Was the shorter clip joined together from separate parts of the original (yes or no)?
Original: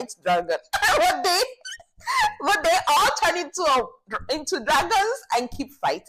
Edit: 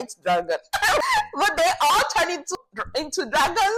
yes